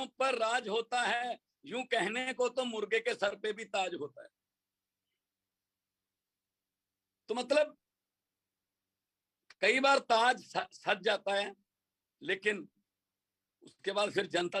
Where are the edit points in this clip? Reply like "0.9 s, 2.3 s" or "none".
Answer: none